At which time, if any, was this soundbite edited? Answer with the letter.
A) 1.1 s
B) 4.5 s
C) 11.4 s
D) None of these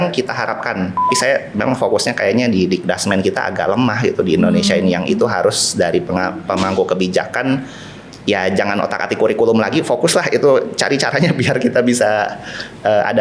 A